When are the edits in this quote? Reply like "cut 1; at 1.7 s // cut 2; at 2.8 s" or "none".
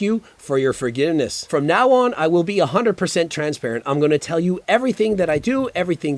cut 1; at 1.4 s